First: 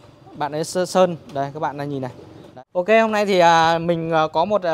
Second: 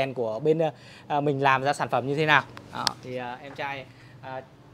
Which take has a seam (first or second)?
first